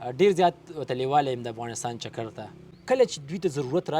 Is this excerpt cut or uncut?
cut